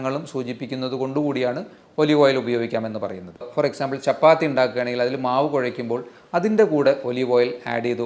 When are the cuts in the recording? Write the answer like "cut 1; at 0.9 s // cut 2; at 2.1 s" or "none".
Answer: cut 1; at 3.4 s